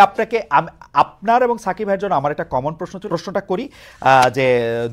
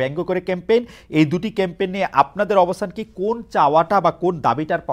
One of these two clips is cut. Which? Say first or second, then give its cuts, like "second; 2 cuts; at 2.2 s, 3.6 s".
first; 1 cut; at 3.0 s